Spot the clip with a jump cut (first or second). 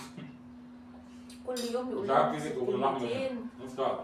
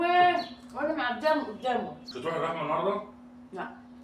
second